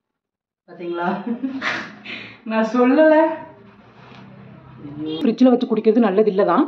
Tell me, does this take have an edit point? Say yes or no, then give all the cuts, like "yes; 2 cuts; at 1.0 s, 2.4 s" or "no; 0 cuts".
yes; 1 cut; at 5.2 s